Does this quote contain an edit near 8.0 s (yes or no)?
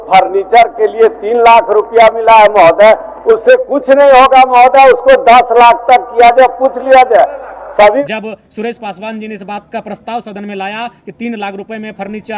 yes